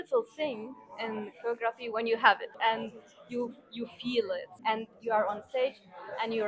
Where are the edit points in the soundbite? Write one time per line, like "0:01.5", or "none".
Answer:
0:02.5
0:04.5